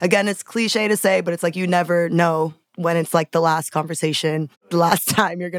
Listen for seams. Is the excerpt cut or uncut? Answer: cut